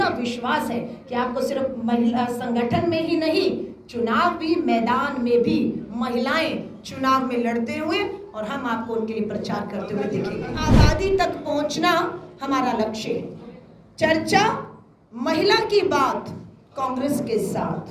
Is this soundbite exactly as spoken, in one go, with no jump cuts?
no; 1 cut; at 10.7 s

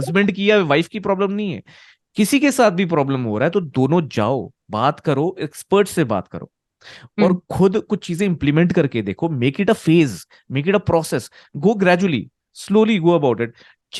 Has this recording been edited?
no; 0 cuts

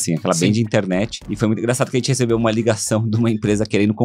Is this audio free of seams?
no; 1 cut; at 1.2 s

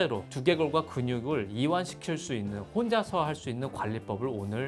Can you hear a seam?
no; 0 cuts

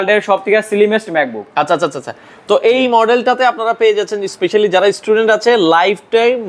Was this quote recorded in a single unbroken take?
yes; 0 cuts

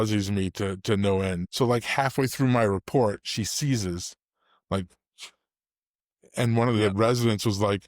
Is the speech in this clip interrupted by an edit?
yes; 1 cut; at 1.5 s

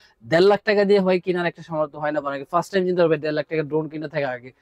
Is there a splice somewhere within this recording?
no; 0 cuts

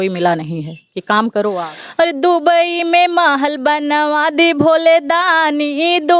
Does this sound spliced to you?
yes; 1 cut; at 1.6 s

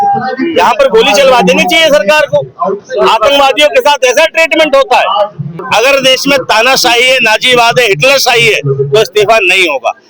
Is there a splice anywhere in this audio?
yes; 1 cut; at 5.6 s

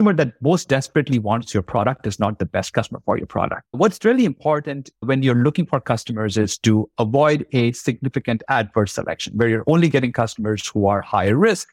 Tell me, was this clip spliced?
yes; 1 cut; at 3.6 s

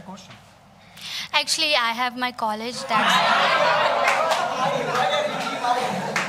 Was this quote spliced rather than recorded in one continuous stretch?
no; 0 cuts

